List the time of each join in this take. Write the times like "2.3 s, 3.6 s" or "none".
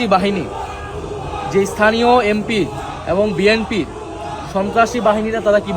none